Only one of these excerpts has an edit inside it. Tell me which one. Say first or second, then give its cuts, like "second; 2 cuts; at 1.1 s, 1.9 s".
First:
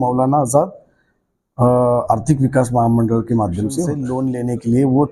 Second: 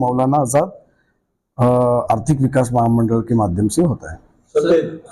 first; 1 cut; at 4.0 s